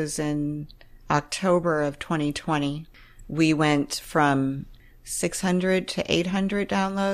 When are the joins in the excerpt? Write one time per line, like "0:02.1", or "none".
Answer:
0:02.8
0:04.7

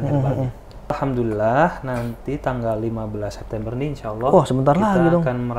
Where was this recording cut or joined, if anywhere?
0:01.0

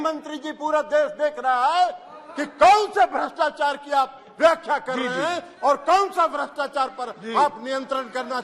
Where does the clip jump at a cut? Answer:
none

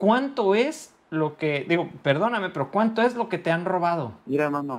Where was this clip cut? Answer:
none

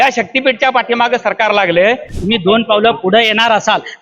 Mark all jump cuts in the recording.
0:02.1

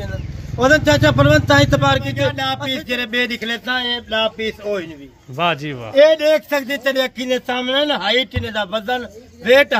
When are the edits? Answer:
0:02.5

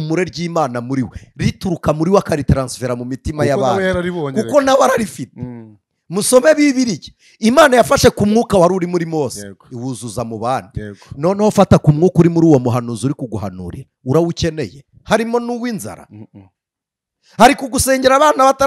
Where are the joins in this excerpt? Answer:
none

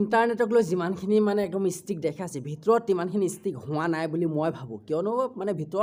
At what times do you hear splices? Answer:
none

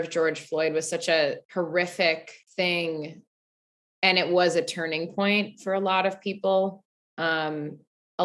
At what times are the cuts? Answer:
0:01.4
0:02.4

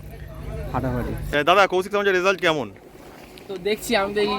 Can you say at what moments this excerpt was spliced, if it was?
0:01.2

